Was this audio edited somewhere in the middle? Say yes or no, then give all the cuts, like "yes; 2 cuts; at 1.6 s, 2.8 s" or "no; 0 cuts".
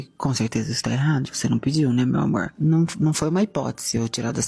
yes; 1 cut; at 2.5 s